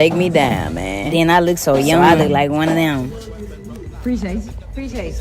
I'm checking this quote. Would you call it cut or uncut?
cut